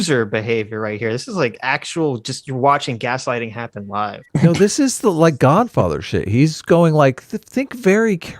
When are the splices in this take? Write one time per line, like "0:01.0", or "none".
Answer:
0:04.2